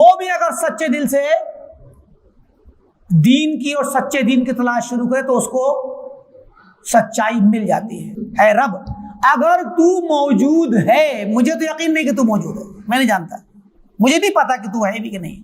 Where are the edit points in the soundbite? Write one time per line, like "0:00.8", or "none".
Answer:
0:08.2

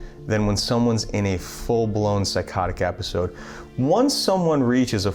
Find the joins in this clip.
none

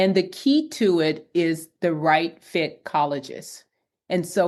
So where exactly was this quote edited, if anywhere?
none

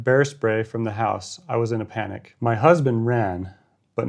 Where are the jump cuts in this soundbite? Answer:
0:02.2

